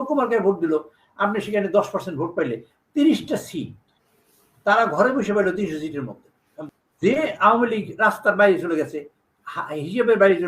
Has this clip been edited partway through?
yes; 1 cut; at 6.6 s

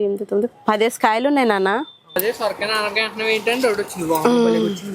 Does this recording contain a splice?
yes; 1 cut; at 2.1 s

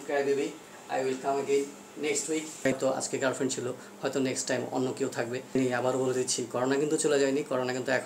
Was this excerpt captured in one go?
no; 2 cuts; at 2.8 s, 5.5 s

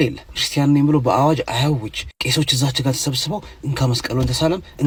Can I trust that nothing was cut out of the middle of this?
yes; 0 cuts

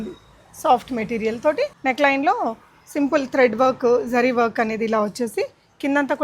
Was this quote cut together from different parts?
yes; 1 cut; at 1.8 s

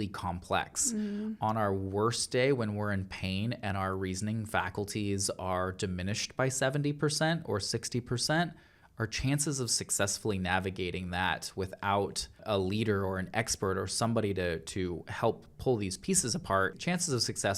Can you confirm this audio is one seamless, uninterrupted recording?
no; 2 cuts; at 12.4 s, 16.8 s

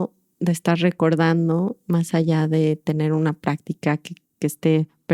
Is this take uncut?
yes; 0 cuts

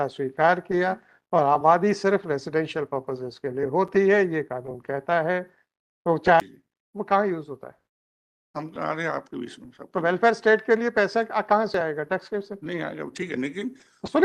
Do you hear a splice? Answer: yes; 1 cut; at 6.4 s

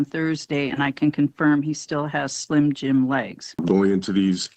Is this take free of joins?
no; 1 cut; at 3.6 s

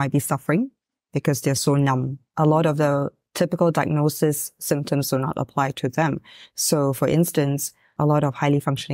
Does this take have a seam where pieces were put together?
yes; 2 cuts; at 2.2 s, 7.8 s

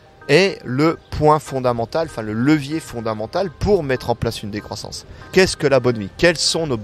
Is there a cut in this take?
yes; 1 cut; at 5.3 s

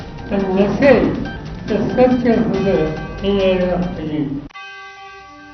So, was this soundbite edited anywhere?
yes; 1 cut; at 4.5 s

